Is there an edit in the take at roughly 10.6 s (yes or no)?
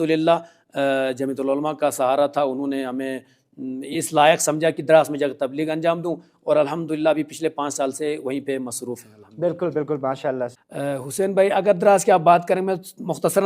yes